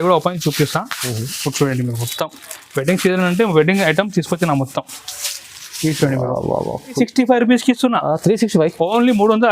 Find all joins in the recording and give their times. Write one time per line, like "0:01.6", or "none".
0:07.0